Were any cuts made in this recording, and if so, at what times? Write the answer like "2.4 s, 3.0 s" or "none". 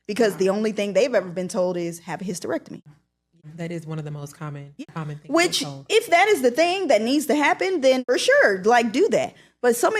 3.5 s, 4.8 s, 8.0 s